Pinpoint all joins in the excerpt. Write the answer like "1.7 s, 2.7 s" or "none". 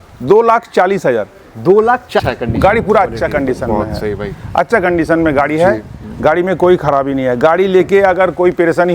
2.2 s